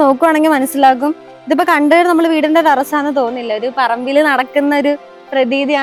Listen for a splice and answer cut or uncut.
uncut